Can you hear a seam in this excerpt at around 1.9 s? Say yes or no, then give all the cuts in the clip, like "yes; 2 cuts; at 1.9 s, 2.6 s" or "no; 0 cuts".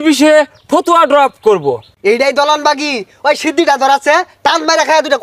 yes; 1 cut; at 1.9 s